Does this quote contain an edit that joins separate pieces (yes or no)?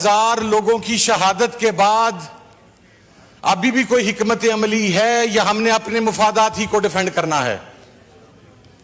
no